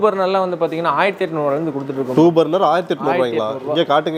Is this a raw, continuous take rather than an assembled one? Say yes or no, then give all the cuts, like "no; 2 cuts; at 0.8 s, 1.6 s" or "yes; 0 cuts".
yes; 0 cuts